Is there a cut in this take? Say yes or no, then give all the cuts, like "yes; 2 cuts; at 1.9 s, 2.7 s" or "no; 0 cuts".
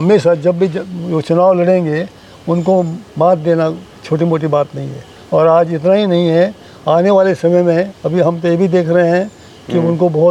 no; 0 cuts